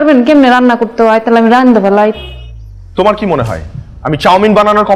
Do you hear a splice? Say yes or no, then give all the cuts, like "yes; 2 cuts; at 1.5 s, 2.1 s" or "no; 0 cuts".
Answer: no; 0 cuts